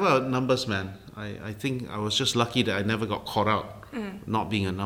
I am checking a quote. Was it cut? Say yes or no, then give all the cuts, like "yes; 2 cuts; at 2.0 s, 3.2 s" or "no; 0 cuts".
no; 0 cuts